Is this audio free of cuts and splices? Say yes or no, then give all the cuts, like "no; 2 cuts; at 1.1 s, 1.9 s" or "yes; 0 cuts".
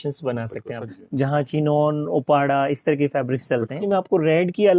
no; 2 cuts; at 0.8 s, 3.8 s